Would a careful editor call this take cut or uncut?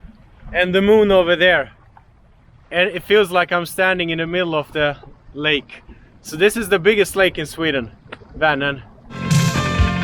cut